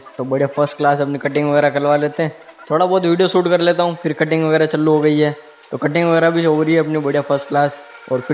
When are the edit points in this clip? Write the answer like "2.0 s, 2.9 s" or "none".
none